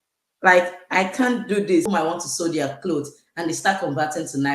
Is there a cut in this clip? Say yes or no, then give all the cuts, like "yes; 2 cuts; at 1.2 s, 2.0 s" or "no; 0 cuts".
yes; 1 cut; at 1.9 s